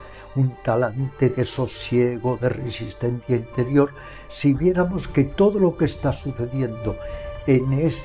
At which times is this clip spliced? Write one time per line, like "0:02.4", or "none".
none